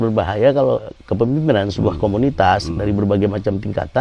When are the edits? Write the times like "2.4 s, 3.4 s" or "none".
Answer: 1.0 s